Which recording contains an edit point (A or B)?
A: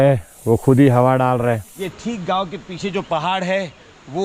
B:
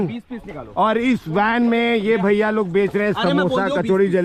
A